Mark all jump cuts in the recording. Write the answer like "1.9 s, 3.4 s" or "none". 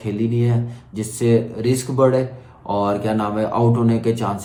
none